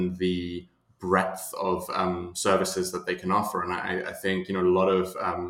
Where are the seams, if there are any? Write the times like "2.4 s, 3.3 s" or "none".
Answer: none